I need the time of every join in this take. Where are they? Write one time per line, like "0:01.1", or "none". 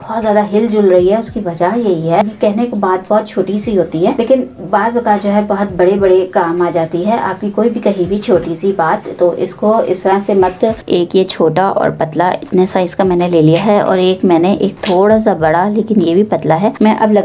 0:02.3
0:10.8